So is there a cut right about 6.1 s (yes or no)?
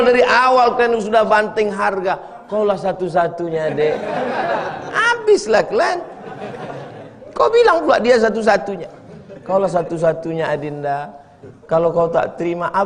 no